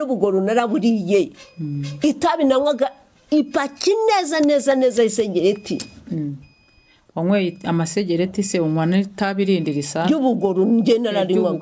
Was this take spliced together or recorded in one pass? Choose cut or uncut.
uncut